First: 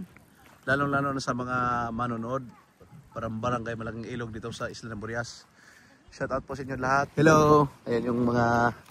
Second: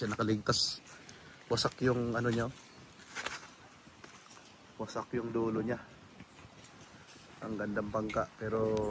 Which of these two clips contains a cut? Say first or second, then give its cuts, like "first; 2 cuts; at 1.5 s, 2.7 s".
first; 1 cut; at 7.1 s